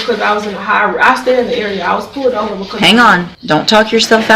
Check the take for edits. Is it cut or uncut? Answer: cut